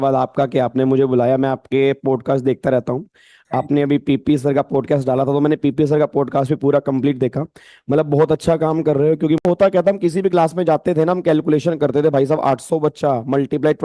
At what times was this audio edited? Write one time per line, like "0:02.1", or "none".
0:09.4